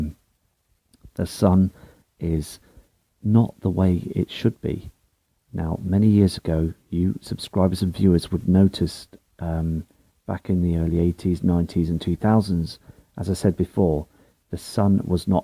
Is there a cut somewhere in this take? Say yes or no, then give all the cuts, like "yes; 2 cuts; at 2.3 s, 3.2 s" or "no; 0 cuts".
yes; 1 cut; at 9.0 s